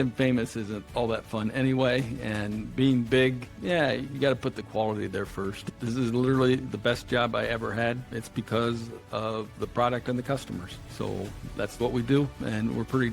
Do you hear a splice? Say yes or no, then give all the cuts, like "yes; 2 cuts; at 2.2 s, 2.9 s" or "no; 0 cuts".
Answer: yes; 4 cuts; at 3.5 s, 5.6 s, 8.1 s, 10.8 s